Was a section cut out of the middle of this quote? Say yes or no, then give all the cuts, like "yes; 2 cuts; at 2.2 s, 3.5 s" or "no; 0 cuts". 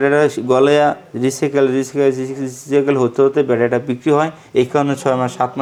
no; 0 cuts